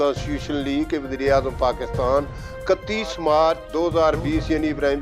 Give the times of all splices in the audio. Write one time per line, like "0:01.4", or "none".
0:03.6